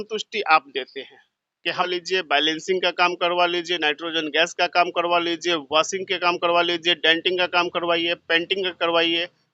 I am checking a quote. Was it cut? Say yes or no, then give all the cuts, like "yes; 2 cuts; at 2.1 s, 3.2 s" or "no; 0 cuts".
yes; 1 cut; at 1.9 s